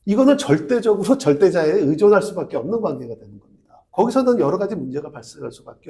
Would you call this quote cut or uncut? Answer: cut